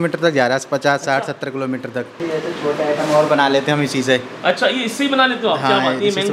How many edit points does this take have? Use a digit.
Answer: 1